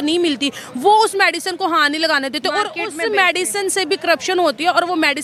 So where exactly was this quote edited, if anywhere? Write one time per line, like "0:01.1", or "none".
none